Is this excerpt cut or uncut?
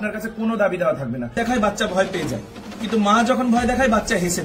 cut